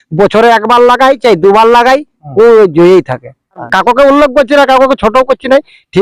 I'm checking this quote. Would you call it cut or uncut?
cut